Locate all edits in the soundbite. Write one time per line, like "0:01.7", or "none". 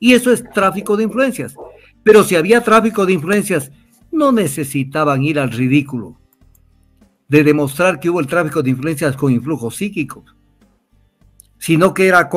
none